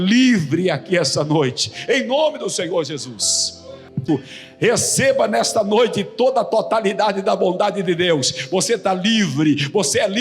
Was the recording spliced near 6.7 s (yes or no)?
no